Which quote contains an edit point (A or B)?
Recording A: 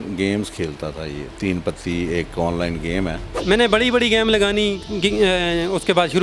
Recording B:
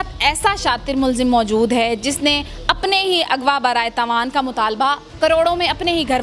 A